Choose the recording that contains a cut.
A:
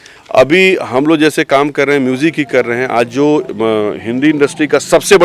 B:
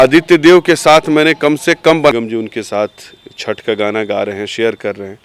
B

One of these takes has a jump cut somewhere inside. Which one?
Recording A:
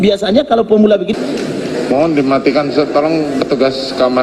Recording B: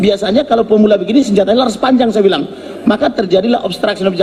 A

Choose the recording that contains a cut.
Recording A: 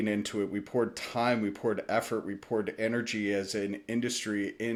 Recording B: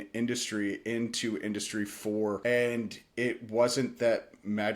B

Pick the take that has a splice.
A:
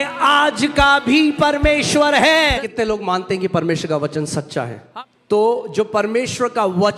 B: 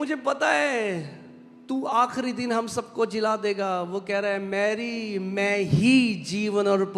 A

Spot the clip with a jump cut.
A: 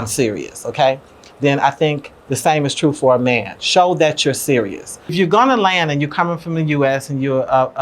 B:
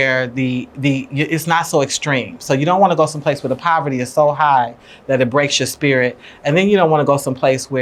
A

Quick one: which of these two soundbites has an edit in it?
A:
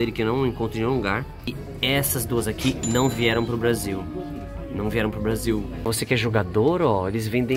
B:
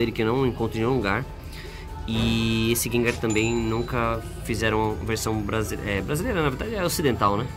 A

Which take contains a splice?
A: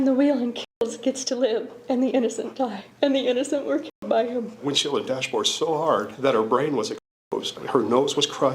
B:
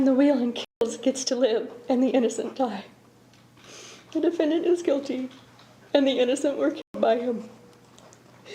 A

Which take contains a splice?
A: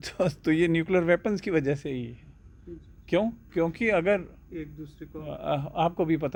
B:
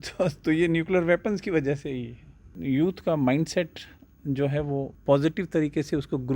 B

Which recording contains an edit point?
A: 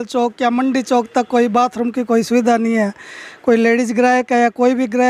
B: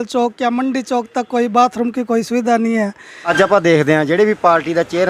B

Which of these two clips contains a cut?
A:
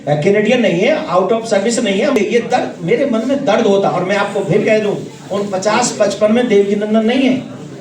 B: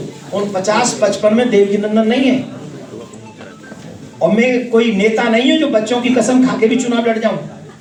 A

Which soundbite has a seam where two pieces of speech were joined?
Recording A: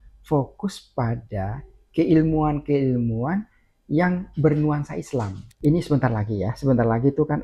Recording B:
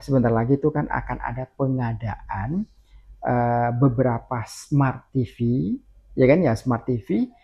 A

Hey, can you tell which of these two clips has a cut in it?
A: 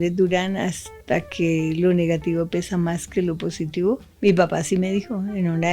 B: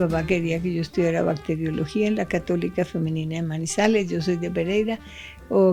A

